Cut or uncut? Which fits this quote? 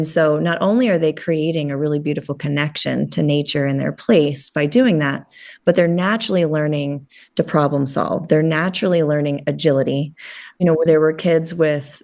uncut